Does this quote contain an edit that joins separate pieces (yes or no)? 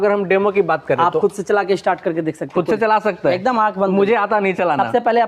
no